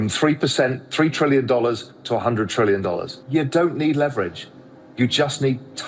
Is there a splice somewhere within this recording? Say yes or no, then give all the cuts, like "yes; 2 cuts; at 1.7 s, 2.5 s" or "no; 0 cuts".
yes; 1 cut; at 3.1 s